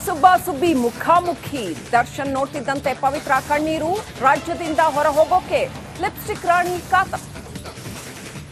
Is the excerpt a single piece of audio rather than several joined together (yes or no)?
yes